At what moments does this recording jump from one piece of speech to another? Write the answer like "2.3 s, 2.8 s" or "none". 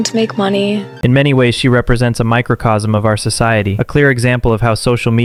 none